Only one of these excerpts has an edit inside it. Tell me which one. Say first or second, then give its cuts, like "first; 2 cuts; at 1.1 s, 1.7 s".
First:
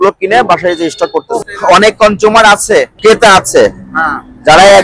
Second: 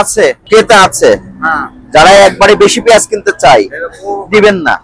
first; 1 cut; at 1.4 s